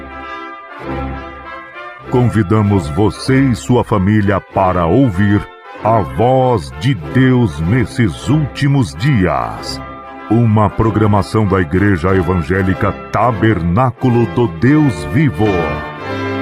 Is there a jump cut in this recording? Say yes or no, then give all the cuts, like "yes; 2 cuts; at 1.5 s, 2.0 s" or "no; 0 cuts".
yes; 2 cuts; at 2.0 s, 15.7 s